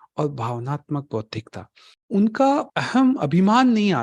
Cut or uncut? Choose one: cut